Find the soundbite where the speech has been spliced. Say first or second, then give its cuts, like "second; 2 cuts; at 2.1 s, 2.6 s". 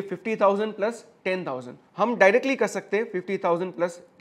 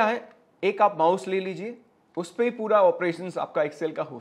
first; 1 cut; at 1.8 s